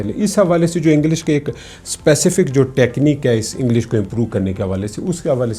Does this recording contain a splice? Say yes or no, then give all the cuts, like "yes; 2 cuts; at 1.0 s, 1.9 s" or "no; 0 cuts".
no; 0 cuts